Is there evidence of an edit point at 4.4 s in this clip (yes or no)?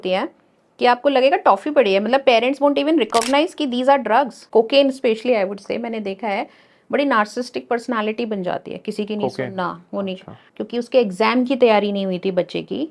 yes